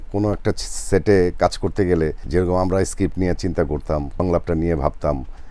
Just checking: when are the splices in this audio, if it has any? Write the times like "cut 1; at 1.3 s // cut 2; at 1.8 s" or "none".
cut 1; at 2.2 s // cut 2; at 4.1 s